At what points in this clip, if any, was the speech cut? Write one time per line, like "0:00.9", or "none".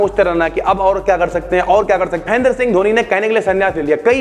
0:02.3